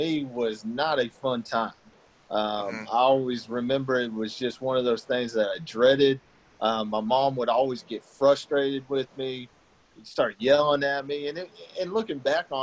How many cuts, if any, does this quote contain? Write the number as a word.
zero